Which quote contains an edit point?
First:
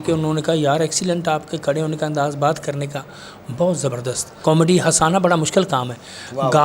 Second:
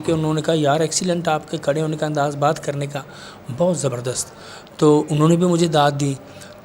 first; 1 cut; at 4.3 s

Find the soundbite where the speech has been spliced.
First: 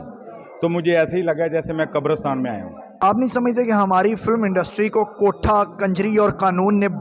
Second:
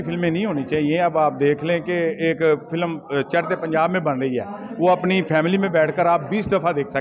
first; 1 cut; at 2.8 s

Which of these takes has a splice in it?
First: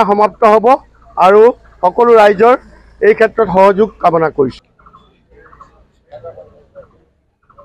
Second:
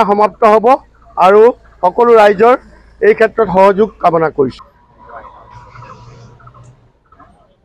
first; 1 cut; at 4.6 s

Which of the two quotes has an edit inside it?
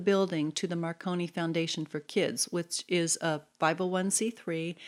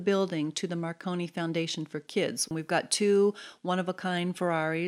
second; 1 cut; at 2.5 s

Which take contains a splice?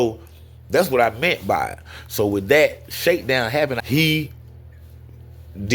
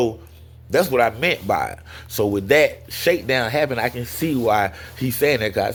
first; 1 cut; at 3.8 s

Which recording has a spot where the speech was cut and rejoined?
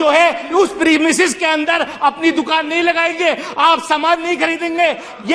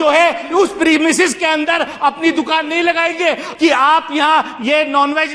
second; 1 cut; at 3.5 s

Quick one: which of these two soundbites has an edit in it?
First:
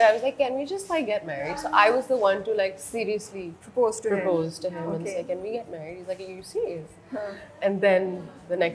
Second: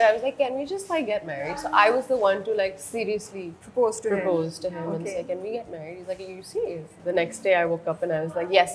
second; 1 cut; at 6.9 s

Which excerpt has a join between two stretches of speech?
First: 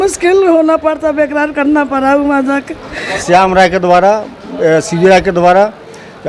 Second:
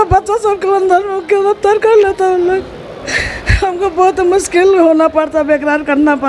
first; 1 cut; at 3.1 s

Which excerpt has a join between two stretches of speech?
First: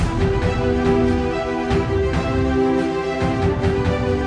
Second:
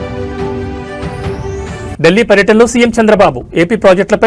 second; 1 cut; at 1.9 s

